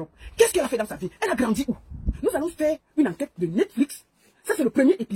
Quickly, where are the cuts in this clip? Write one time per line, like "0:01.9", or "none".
none